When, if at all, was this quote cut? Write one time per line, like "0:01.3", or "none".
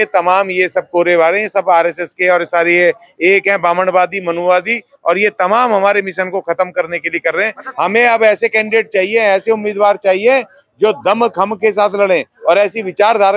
0:07.6